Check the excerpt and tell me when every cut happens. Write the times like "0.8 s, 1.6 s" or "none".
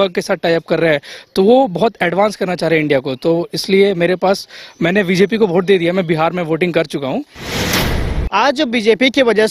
7.8 s